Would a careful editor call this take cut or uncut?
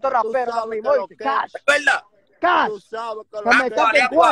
uncut